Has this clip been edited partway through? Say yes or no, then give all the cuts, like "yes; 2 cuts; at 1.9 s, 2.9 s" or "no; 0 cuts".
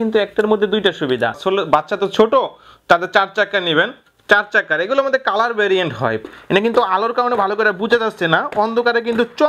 yes; 2 cuts; at 1.4 s, 6.2 s